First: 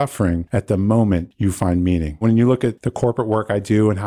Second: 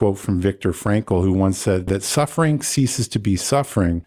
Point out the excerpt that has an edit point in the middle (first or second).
first